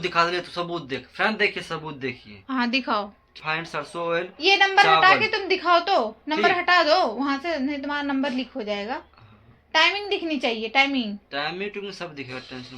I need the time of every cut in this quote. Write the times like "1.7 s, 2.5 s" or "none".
3.3 s